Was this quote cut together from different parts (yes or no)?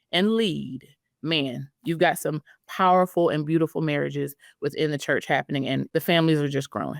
yes